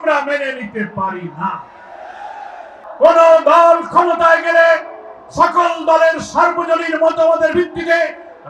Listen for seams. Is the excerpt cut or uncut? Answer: cut